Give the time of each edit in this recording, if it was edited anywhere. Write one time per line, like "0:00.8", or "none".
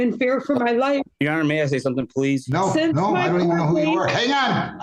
0:01.3
0:02.5